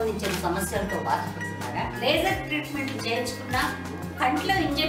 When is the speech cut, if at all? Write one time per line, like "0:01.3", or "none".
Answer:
none